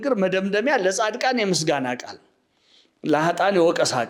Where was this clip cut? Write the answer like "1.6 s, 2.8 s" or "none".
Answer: none